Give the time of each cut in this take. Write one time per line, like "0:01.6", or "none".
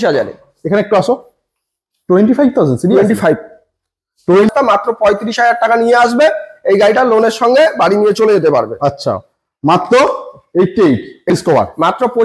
0:04.5
0:11.3